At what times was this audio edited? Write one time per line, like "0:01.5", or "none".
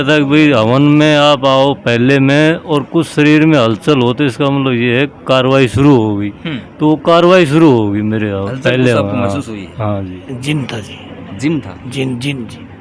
0:10.3